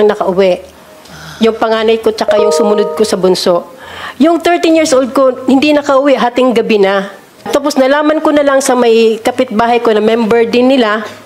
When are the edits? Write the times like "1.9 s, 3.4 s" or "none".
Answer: 7.5 s